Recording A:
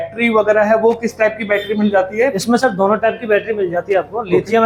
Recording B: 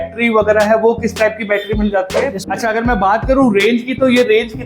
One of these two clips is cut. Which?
B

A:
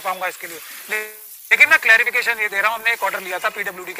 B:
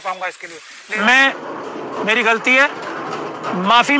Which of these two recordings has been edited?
B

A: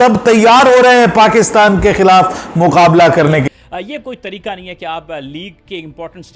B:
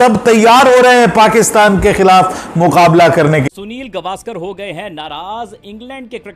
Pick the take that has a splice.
A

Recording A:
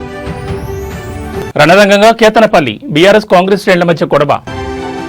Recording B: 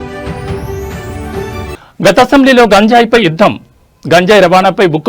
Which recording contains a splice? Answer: A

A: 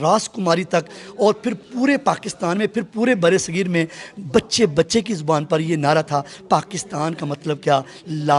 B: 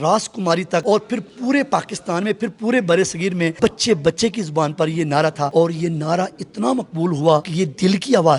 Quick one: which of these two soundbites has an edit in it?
B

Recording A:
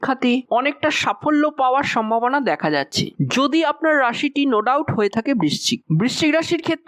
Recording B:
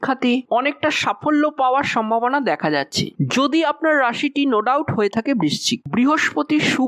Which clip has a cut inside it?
B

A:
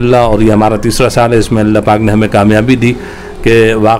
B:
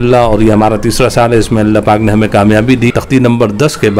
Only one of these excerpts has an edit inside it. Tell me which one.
B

